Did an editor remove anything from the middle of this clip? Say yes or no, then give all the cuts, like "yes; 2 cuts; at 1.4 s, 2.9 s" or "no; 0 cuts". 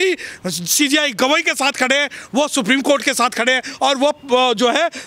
no; 0 cuts